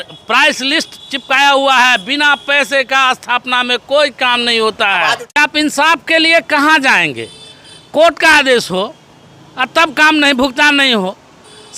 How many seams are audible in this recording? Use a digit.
1